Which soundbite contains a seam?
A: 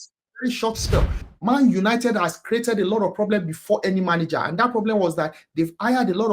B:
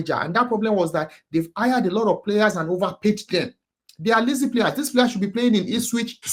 A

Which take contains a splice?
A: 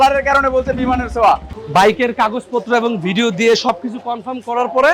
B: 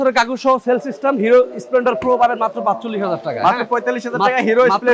A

